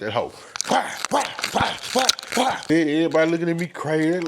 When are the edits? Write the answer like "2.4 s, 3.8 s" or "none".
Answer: 2.6 s